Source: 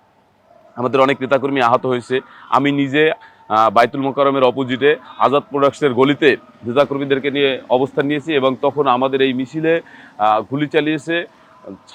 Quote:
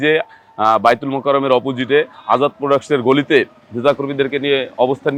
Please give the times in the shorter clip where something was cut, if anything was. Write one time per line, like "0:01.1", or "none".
none